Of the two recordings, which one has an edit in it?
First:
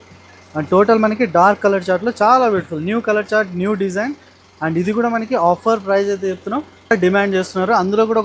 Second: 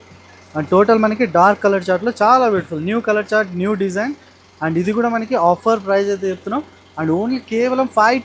first; 1 cut; at 6.9 s

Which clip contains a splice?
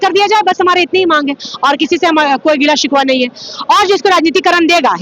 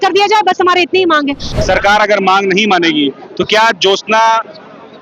second; 1 cut; at 1.4 s

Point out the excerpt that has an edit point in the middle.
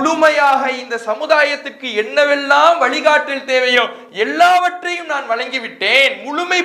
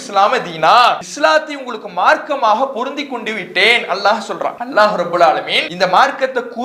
second; 3 cuts; at 1.1 s, 4.6 s, 5.6 s

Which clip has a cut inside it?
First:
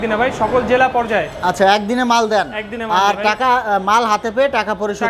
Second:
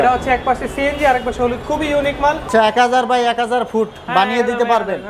second; 1 cut; at 2.5 s

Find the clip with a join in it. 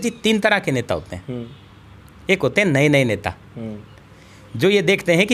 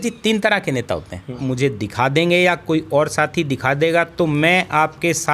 second; 1 cut; at 1.4 s

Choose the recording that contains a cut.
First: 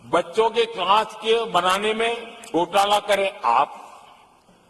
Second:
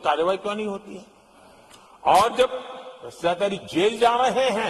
first; 1 cut; at 2.3 s

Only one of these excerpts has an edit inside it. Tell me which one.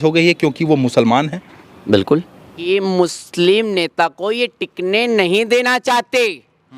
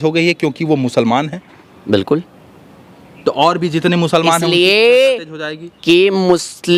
first; 1 cut; at 2.7 s

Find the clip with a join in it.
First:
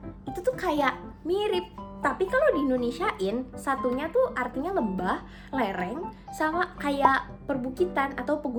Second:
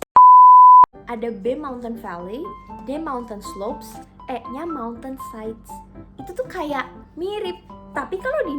second; 1 cut; at 1.0 s

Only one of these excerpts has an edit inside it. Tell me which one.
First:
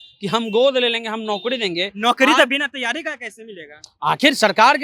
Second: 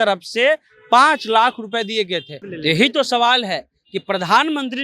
second; 1 cut; at 2.4 s

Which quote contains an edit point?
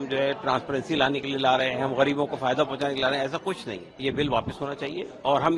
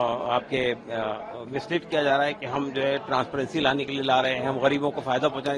first; 1 cut; at 4.0 s

